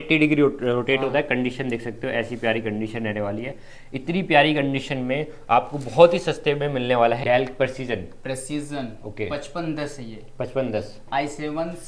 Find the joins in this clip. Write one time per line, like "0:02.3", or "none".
0:07.2